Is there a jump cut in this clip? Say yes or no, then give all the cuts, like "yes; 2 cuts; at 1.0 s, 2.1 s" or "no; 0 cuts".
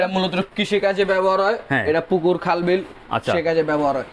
no; 0 cuts